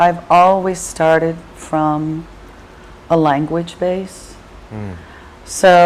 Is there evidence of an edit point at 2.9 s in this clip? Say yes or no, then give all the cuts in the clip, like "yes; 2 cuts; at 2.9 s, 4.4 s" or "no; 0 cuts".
yes; 1 cut; at 2.9 s